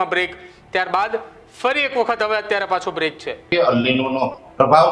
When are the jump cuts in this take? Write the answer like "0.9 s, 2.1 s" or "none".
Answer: 3.5 s